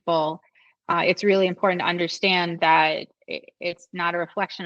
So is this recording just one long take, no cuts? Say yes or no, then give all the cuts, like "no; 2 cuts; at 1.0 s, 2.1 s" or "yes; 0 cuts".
yes; 0 cuts